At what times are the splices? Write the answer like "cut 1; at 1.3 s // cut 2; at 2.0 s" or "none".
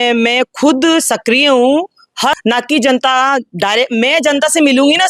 cut 1; at 2.4 s

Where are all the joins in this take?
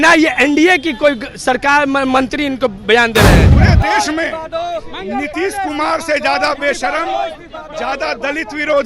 cut 1; at 3.4 s

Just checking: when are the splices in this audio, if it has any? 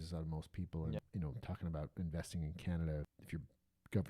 cut 1; at 1.0 s // cut 2; at 3.1 s

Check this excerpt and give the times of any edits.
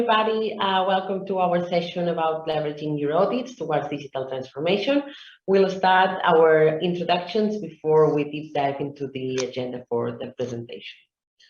none

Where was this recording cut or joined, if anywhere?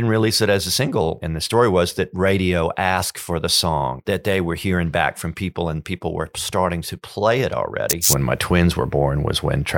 cut 1; at 1.2 s // cut 2; at 4.0 s // cut 3; at 8.1 s

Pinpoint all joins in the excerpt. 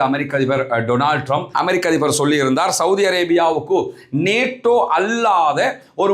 cut 1; at 1.5 s

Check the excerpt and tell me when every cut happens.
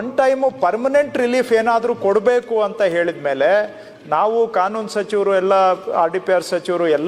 none

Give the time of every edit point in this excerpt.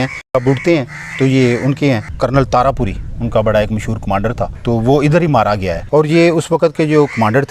cut 1; at 2.1 s // cut 2; at 4.6 s // cut 3; at 5.8 s

